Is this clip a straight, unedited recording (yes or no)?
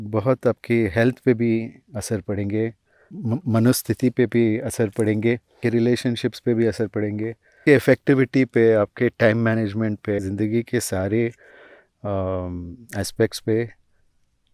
no